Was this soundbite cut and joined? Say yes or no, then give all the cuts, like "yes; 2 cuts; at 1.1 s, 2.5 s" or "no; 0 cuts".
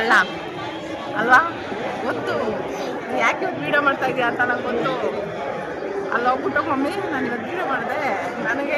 no; 0 cuts